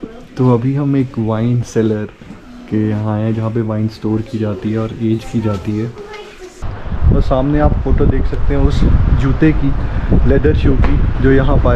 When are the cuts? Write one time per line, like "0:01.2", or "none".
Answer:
0:06.6